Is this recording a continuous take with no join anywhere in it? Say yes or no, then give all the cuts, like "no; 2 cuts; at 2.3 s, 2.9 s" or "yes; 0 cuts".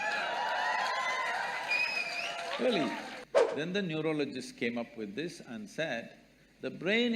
no; 1 cut; at 3.1 s